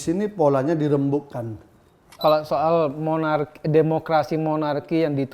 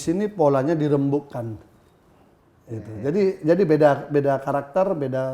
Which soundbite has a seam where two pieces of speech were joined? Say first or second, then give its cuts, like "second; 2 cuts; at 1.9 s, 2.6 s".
first; 1 cut; at 2.2 s